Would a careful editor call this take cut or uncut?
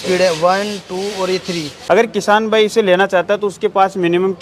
cut